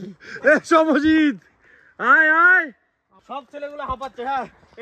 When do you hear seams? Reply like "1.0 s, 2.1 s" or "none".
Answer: 3.2 s